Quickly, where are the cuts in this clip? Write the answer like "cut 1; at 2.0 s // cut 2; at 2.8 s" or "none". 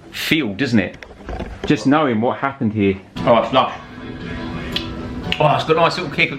cut 1; at 3.1 s